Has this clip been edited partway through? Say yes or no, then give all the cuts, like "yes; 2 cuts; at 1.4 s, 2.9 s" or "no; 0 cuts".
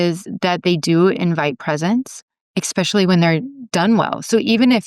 yes; 1 cut; at 3.6 s